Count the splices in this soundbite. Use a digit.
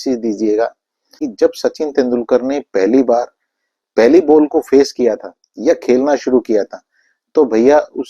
1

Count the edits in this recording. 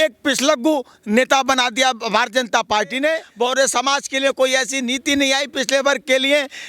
1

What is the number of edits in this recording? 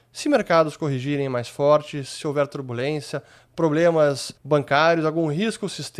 1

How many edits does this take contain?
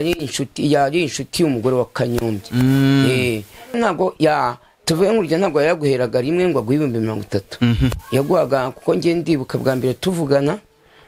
1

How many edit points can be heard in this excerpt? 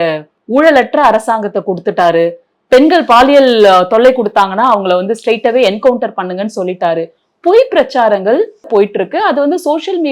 1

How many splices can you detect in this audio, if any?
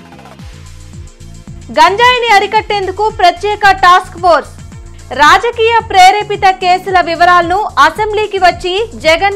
1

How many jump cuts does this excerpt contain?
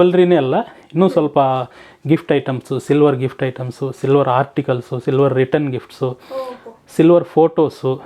0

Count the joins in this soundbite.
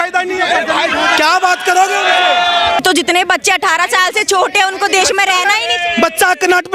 1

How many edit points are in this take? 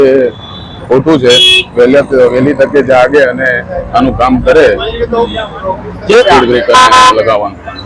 0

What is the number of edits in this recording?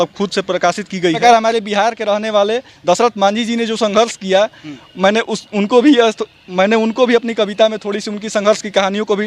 1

